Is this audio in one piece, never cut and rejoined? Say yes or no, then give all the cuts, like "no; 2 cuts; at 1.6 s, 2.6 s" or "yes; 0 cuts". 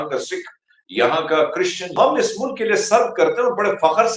no; 1 cut; at 2.0 s